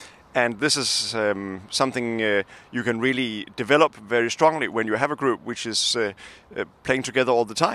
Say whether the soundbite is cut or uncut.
uncut